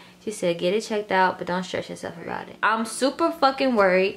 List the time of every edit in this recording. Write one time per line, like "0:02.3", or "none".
0:02.5